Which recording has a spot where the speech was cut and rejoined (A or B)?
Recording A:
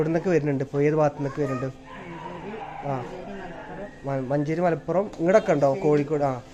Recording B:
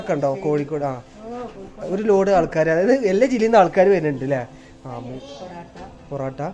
B